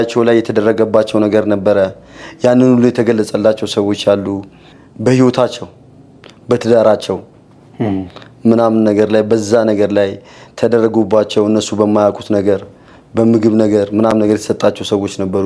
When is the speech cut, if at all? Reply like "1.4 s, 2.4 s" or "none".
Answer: none